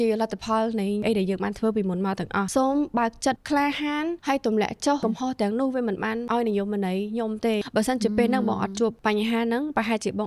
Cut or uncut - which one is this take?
cut